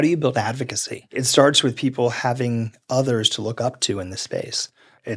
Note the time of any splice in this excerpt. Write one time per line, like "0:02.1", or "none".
0:01.1